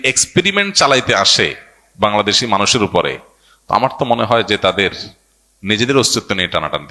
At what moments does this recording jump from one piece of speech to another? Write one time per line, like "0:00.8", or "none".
none